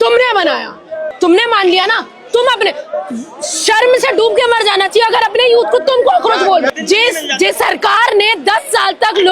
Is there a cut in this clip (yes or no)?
yes